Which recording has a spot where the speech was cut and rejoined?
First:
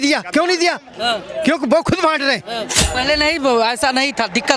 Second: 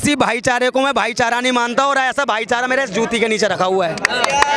first; 1 cut; at 2.8 s

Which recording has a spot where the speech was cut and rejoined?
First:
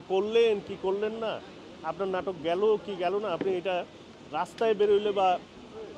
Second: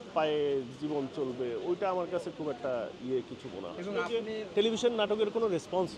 second; 1 cut; at 4.0 s

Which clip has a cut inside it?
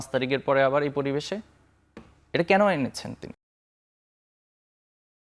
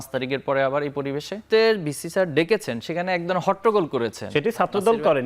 second; 1 cut; at 1.5 s

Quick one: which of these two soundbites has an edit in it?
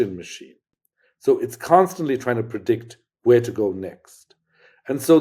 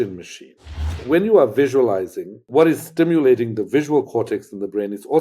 second; 2 cuts; at 1.0 s, 2.4 s

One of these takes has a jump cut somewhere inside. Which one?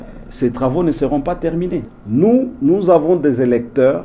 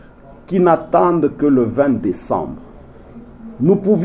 first; 1 cut; at 1.9 s

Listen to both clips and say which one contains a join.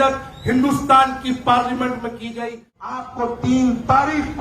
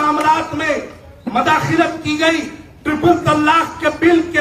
first; 1 cut; at 2.9 s

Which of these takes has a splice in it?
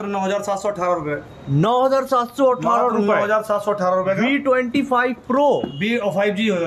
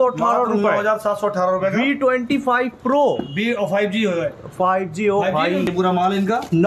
second; 1 cut; at 5.7 s

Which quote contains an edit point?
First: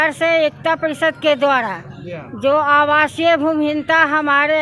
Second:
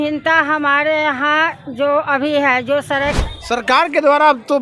second; 1 cut; at 3.2 s

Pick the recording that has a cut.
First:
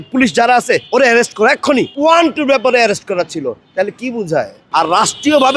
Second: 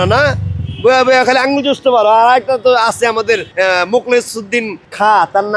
first; 1 cut; at 4.6 s

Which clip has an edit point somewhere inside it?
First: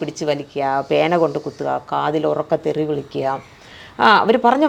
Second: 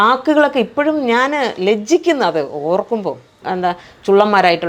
second; 1 cut; at 3.4 s

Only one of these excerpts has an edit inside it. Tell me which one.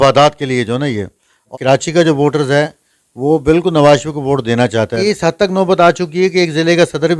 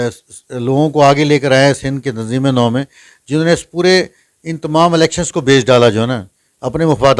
first; 2 cuts; at 1.5 s, 5.0 s

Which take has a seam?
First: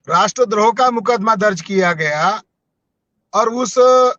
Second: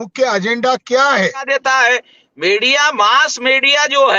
second; 1 cut; at 1.5 s

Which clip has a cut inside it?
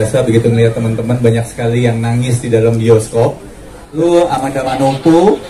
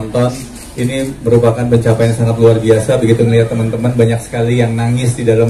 first; 1 cut; at 4.0 s

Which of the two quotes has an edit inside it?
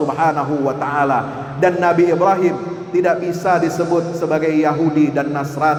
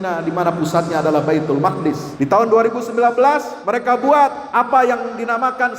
second; 3 cuts; at 2.1 s, 3.5 s, 4.4 s

